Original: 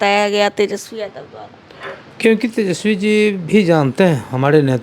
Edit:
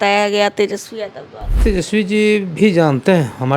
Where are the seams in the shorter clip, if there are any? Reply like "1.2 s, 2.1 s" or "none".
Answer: 1.6 s